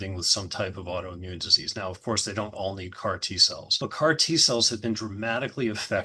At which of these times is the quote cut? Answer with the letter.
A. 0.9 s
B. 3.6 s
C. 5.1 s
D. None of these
B